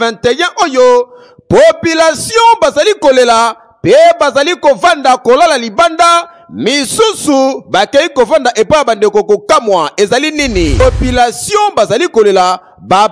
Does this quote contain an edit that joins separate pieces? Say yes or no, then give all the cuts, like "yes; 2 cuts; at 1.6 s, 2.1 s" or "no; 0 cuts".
yes; 1 cut; at 10.8 s